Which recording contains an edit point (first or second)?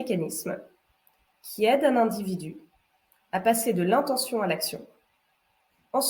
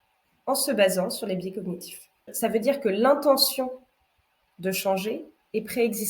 second